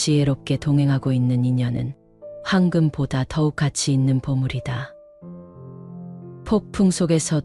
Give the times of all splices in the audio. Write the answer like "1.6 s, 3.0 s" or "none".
none